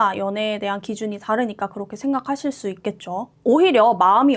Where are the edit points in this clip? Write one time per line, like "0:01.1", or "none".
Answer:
0:03.2